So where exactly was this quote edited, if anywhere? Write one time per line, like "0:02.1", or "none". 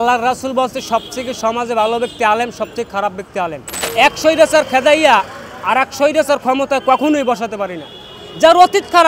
0:03.9